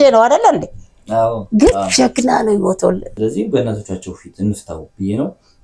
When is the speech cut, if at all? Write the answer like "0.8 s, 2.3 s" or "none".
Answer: 3.1 s